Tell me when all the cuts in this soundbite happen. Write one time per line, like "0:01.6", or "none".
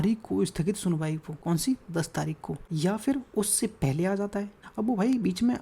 0:01.3
0:02.6
0:04.6